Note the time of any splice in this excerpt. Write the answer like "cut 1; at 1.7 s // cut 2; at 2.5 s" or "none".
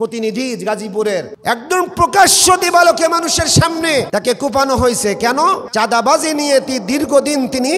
cut 1; at 4.1 s // cut 2; at 5.6 s